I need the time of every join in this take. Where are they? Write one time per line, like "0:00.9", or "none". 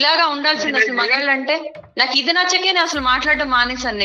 none